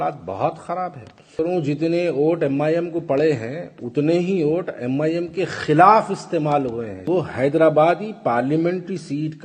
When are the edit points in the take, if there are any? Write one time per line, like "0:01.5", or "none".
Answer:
0:01.3
0:07.0